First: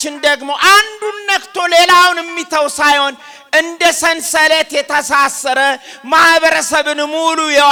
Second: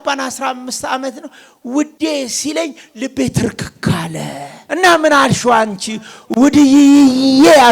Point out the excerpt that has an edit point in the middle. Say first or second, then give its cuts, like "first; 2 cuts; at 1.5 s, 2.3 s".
second; 1 cut; at 4.5 s